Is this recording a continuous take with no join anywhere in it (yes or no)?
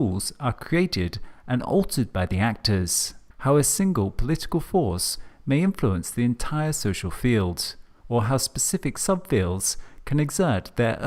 yes